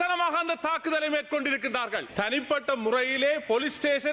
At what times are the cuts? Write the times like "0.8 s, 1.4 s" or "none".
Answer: 2.0 s

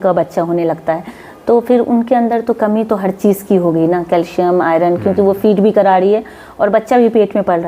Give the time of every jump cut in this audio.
none

